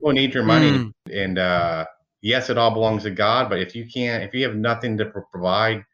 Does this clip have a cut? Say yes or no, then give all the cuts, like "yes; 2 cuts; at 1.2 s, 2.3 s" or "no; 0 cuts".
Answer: yes; 1 cut; at 1.1 s